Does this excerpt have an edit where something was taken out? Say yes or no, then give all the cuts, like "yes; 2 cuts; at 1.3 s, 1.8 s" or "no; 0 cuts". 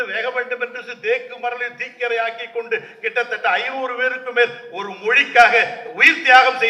no; 0 cuts